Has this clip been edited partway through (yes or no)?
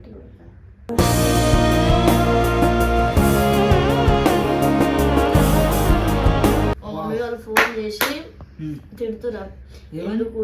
yes